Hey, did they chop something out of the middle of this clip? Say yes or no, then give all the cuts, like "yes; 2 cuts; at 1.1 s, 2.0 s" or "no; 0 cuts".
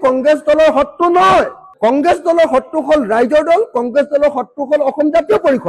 no; 0 cuts